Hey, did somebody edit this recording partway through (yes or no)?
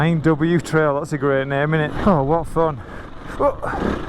yes